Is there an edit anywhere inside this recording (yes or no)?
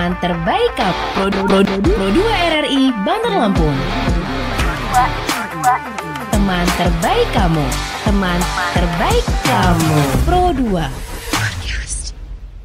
no